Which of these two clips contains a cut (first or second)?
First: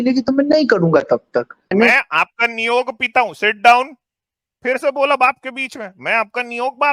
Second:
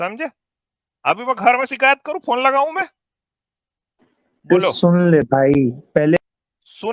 first